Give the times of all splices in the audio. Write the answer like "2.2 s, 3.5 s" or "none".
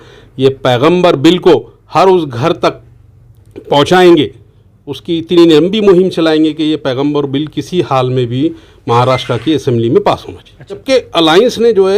10.8 s